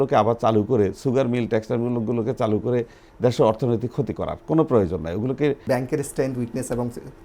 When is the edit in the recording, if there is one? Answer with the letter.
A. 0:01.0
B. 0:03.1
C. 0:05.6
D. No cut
C